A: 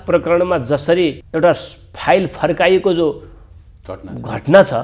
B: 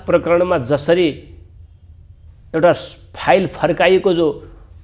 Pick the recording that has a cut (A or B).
A